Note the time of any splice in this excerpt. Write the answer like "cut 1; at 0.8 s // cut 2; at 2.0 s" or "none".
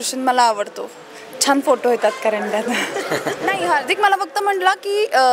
cut 1; at 3.5 s